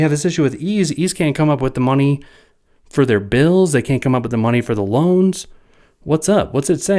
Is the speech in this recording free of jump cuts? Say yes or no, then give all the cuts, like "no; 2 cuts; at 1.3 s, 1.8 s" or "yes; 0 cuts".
yes; 0 cuts